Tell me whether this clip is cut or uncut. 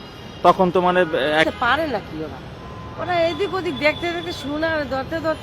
cut